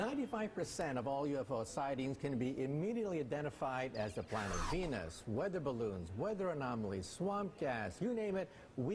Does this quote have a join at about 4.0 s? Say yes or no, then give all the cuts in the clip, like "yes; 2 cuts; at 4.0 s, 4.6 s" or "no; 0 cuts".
no; 1 cut; at 5.8 s